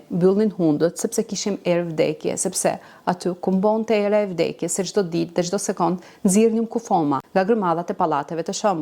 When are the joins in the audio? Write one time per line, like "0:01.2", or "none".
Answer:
0:07.2

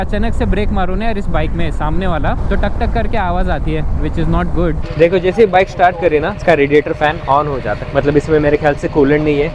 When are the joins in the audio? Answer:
0:04.8

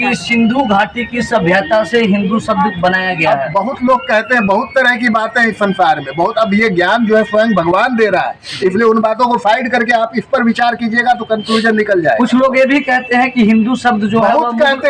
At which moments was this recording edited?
none

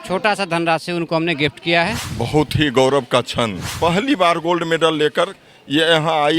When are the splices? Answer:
0:02.0
0:03.6

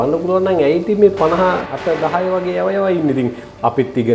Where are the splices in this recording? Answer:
0:01.7

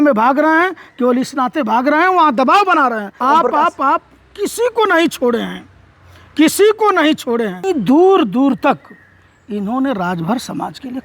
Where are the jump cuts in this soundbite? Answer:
0:03.2
0:07.7

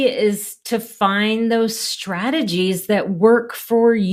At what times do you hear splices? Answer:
none

